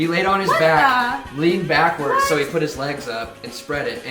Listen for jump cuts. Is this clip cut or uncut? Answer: uncut